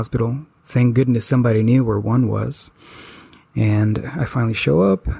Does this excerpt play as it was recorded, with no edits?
yes; 0 cuts

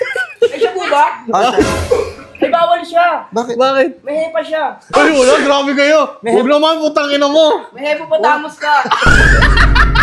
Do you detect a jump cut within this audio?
no; 0 cuts

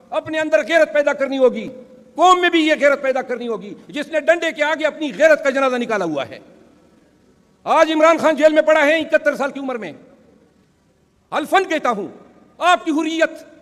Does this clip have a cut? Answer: no; 0 cuts

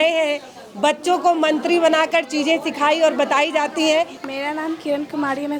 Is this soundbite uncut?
no; 1 cut; at 4.2 s

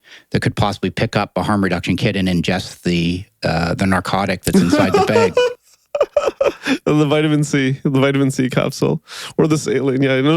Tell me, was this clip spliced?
no; 0 cuts

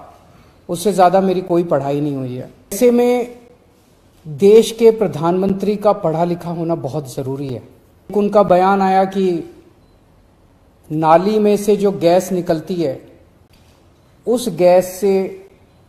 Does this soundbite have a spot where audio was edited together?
yes; 2 cuts; at 2.8 s, 8.1 s

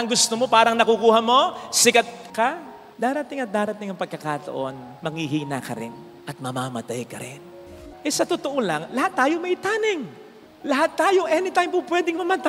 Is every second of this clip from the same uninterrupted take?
no; 1 cut; at 7.6 s

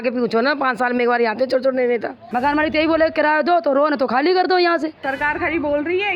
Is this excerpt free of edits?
no; 2 cuts; at 2.3 s, 5.0 s

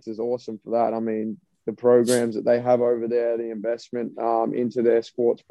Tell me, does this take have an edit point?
no; 0 cuts

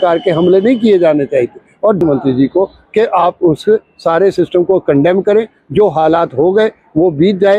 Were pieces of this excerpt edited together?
yes; 1 cut; at 2.0 s

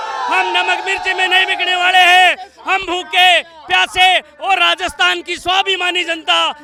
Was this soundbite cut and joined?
no; 0 cuts

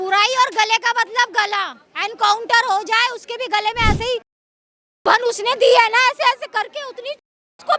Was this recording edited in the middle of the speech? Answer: no; 0 cuts

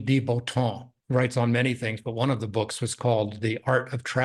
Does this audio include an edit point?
yes; 1 cut; at 0.9 s

